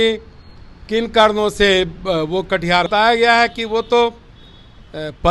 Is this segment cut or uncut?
cut